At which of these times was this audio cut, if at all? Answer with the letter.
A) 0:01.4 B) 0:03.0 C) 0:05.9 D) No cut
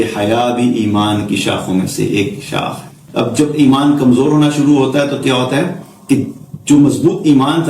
B